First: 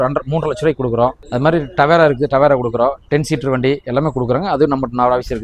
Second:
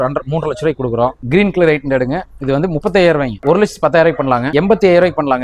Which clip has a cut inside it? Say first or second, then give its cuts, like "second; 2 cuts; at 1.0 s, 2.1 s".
second; 3 cuts; at 1.2 s, 3.4 s, 4.5 s